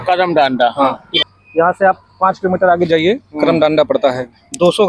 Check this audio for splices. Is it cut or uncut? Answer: cut